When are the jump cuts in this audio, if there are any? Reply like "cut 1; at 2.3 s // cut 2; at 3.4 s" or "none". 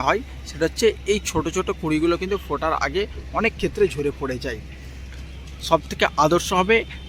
none